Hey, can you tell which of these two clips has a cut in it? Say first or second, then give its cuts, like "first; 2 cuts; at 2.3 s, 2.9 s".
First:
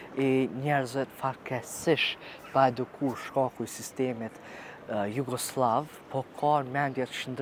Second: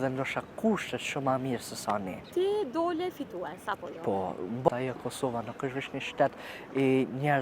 second; 2 cuts; at 2.3 s, 4.7 s